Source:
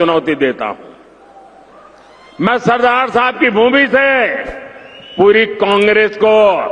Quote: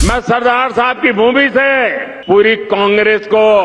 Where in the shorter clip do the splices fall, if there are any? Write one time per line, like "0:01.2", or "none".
0:02.1